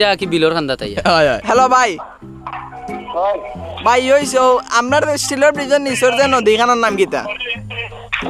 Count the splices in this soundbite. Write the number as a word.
one